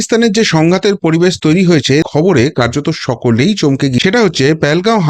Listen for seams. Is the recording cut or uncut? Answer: cut